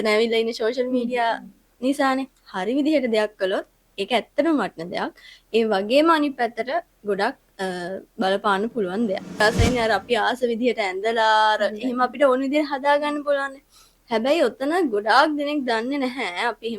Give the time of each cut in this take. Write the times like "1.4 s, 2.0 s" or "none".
9.4 s